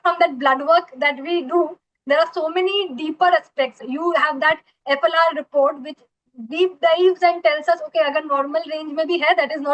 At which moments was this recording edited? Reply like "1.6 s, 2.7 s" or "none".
3.8 s